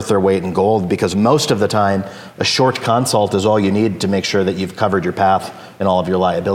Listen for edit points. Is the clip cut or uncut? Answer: uncut